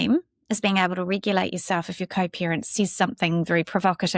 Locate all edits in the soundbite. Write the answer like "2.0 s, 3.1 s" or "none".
none